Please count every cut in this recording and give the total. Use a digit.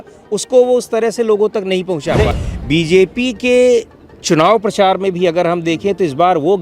1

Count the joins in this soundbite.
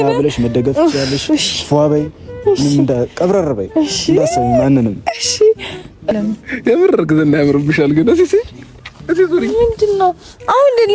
1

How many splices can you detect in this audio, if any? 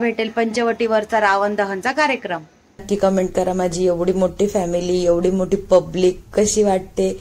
1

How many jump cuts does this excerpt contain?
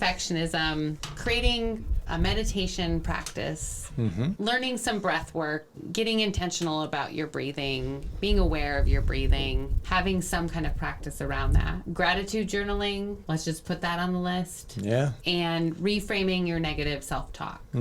6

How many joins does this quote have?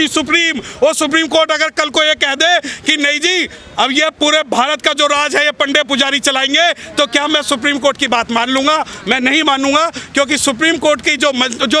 0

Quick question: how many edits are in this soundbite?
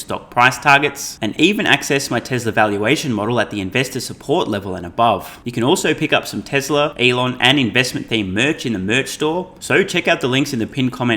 3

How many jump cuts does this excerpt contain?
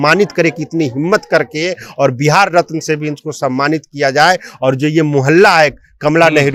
0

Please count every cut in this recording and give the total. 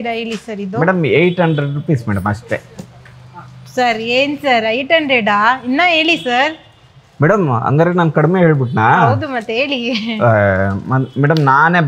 0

